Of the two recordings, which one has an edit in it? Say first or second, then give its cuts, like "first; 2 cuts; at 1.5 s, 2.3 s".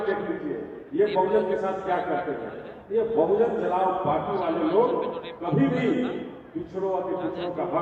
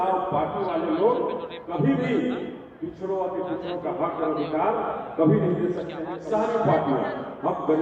second; 1 cut; at 6.1 s